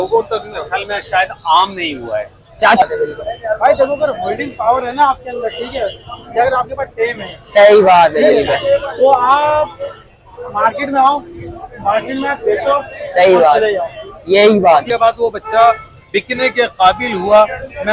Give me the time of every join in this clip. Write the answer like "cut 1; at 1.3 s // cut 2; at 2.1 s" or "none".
cut 1; at 2.8 s // cut 2; at 14.9 s